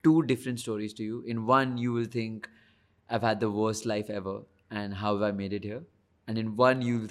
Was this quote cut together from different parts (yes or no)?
no